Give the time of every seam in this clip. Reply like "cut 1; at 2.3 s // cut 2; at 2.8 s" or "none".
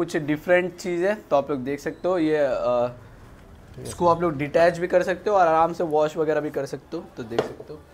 none